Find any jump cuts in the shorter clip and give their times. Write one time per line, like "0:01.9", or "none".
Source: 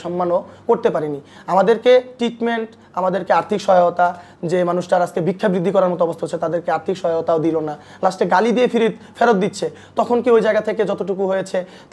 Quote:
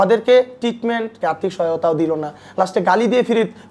0:01.2